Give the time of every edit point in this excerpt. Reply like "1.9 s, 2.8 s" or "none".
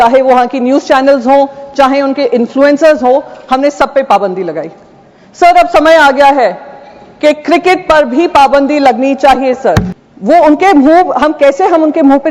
9.9 s